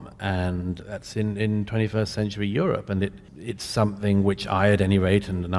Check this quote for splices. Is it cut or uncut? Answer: cut